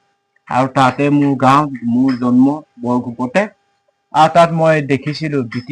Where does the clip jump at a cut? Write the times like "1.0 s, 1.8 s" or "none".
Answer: none